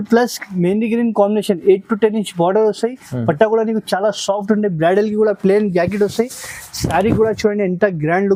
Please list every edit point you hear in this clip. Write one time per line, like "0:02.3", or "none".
none